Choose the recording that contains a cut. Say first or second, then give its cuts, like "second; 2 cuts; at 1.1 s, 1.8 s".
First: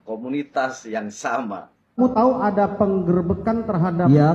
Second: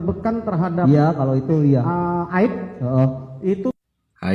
first; 1 cut; at 1.8 s